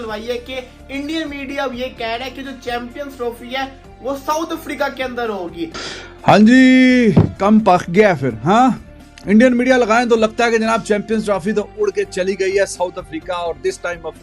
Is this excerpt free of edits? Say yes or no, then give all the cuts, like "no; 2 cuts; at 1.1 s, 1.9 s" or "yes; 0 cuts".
no; 1 cut; at 5.8 s